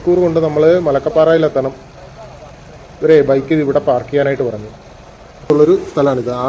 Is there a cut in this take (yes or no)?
yes